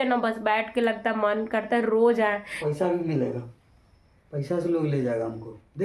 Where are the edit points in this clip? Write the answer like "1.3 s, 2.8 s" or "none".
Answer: 2.5 s